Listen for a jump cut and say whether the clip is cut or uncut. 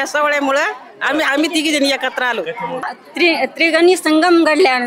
cut